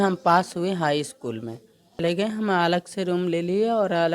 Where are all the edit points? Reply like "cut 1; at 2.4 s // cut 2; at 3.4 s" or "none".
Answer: cut 1; at 2.0 s